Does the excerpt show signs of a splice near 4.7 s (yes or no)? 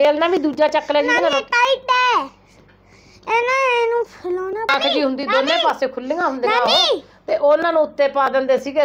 yes